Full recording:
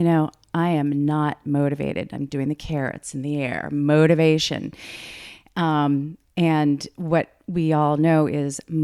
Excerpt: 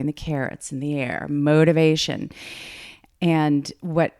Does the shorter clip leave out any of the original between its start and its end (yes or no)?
yes